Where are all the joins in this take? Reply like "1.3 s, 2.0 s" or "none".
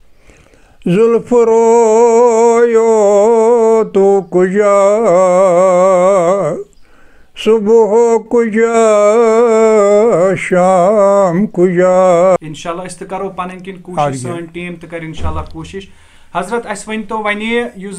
12.4 s